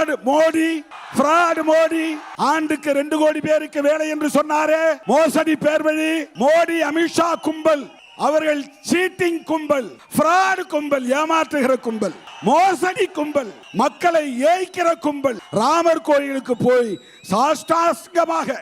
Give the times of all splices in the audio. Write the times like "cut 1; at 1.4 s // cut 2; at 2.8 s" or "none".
cut 1; at 0.9 s // cut 2; at 2.2 s // cut 3; at 5.0 s // cut 4; at 6.3 s // cut 5; at 8.0 s // cut 6; at 10.0 s // cut 7; at 12.3 s // cut 8; at 13.6 s // cut 9; at 15.4 s